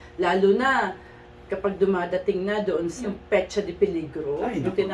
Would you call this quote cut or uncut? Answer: cut